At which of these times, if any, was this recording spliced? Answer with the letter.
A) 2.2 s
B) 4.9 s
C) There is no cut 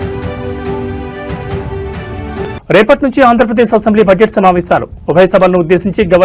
A